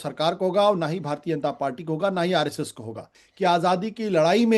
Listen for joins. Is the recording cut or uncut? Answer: cut